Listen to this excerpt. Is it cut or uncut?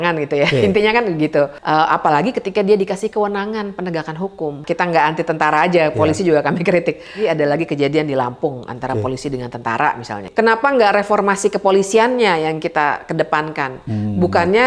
cut